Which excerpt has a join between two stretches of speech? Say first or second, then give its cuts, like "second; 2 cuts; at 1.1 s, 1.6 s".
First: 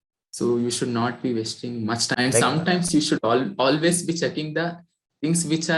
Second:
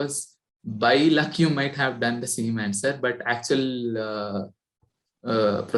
first; 1 cut; at 2.1 s